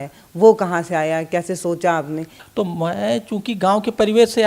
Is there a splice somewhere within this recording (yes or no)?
yes